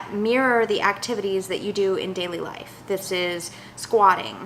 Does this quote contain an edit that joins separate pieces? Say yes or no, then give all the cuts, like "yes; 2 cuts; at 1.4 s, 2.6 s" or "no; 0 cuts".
no; 0 cuts